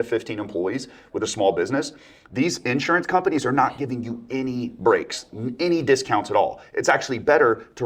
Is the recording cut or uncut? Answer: uncut